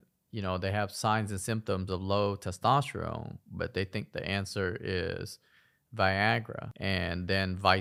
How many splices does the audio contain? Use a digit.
0